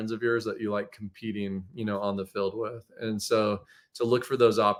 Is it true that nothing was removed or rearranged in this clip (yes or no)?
yes